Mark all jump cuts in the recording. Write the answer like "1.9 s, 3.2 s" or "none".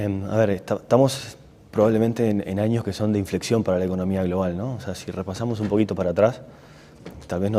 none

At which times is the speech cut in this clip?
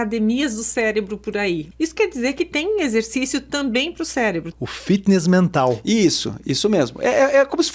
1.7 s, 4.5 s

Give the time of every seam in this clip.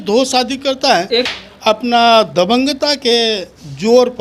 1.3 s

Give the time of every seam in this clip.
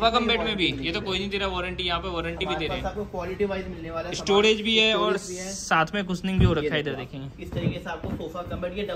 none

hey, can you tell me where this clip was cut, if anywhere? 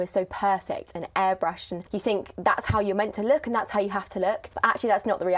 1.7 s, 4.5 s

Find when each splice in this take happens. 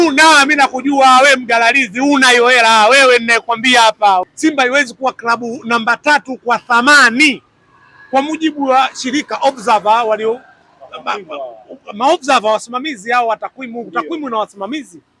4.3 s

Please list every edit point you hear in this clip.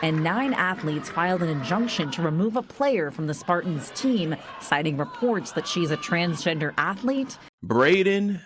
7.5 s

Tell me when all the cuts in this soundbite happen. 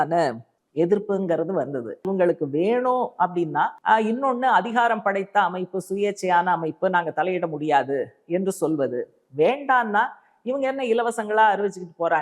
2.0 s, 3.8 s

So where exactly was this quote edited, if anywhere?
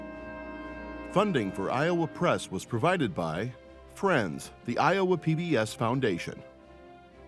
1.1 s

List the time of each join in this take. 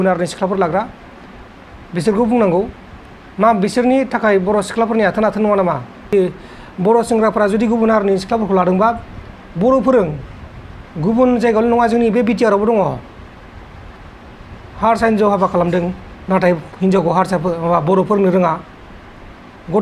6.1 s

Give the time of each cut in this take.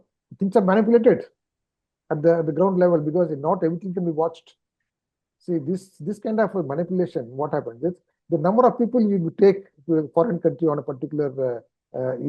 none

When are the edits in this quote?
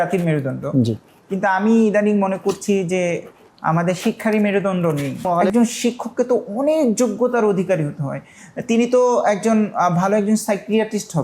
5.2 s

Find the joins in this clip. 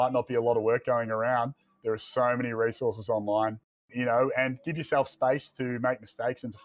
3.9 s

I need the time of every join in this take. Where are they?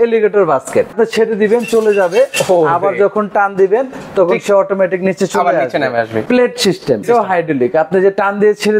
0.9 s, 6.2 s, 7.0 s

